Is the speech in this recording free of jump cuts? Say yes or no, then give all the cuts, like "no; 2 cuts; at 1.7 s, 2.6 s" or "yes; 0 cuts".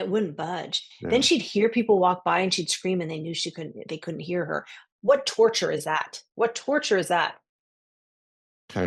yes; 0 cuts